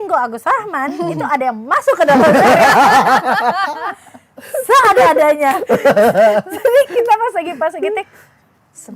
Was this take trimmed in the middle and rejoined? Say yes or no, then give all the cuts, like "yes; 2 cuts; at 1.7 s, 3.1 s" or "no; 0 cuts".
no; 0 cuts